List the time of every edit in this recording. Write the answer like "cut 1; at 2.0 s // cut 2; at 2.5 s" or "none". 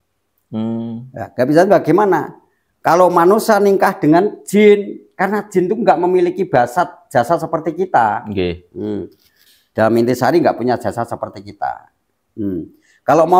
cut 1; at 9.4 s